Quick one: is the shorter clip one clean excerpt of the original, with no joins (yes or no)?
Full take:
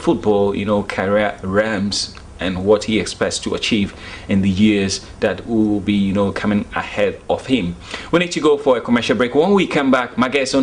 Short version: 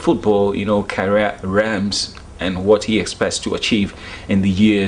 yes